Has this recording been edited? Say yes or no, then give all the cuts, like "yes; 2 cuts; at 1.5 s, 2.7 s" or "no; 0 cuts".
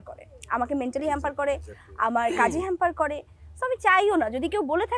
no; 0 cuts